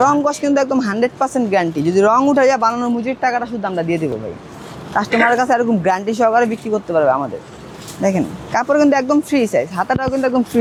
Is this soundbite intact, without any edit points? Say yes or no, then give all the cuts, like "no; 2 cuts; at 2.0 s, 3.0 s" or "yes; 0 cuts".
yes; 0 cuts